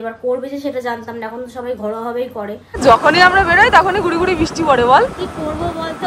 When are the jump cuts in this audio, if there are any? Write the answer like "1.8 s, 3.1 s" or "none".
2.8 s